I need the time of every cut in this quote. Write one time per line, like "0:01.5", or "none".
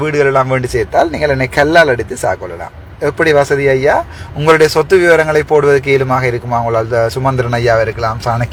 none

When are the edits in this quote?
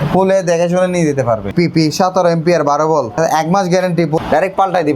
0:01.5
0:03.2
0:04.2

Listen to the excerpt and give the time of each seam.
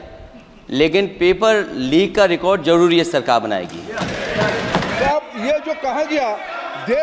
0:04.9

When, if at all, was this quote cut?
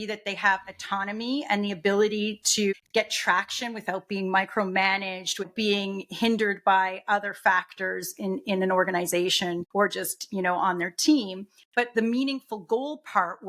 0:02.8

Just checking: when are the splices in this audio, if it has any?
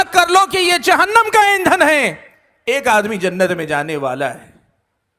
none

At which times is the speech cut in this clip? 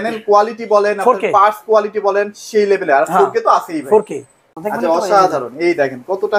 0:04.5

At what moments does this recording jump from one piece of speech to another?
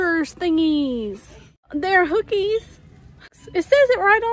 0:01.7
0:03.4

